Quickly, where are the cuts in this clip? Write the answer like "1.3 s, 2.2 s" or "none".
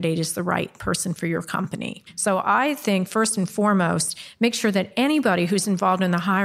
2.1 s